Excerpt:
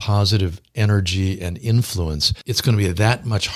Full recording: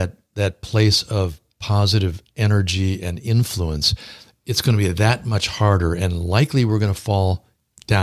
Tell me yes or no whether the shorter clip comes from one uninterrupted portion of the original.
no